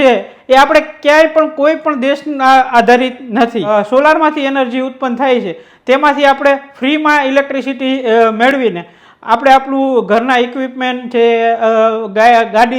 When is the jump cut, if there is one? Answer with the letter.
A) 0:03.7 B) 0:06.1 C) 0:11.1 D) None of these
A